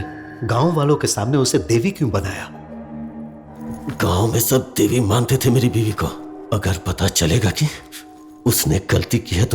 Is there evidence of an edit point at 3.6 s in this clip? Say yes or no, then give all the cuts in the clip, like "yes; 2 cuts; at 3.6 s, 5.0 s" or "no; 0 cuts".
yes; 1 cut; at 3.6 s